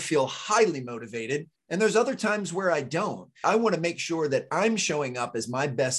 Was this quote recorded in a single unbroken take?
no; 2 cuts; at 1.6 s, 3.5 s

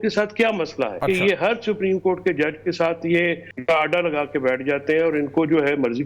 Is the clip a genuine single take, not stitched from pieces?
no; 2 cuts; at 1.0 s, 3.5 s

